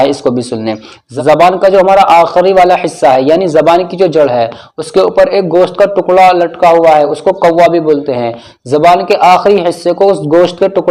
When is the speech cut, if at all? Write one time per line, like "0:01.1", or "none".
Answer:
none